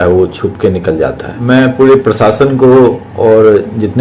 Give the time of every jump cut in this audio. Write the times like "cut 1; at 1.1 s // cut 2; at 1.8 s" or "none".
cut 1; at 1.3 s